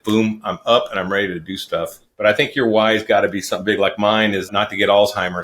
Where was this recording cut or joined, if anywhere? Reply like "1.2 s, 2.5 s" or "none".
2.0 s

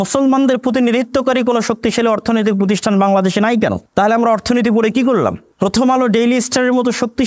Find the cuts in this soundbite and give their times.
3.8 s, 5.5 s

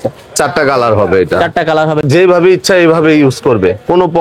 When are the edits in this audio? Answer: 2.1 s

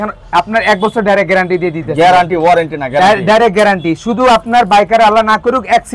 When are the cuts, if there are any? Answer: none

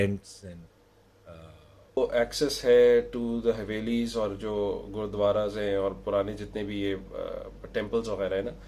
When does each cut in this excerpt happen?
2.0 s

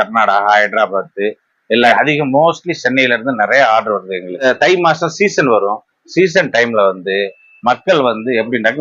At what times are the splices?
1.9 s, 4.4 s

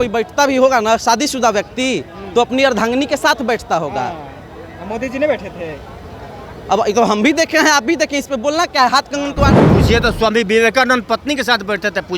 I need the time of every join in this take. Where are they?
9.6 s

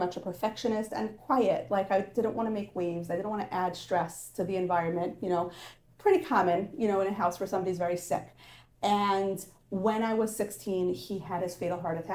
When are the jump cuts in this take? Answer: none

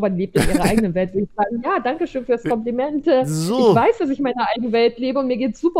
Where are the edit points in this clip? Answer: none

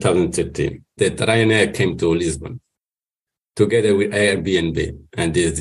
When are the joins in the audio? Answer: 0.9 s

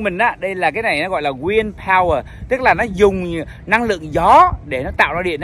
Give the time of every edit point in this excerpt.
none

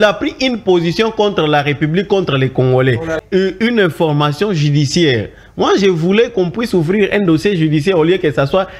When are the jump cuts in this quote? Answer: 3.2 s

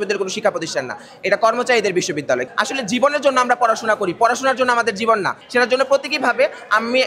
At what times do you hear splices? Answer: 2.5 s, 5.4 s

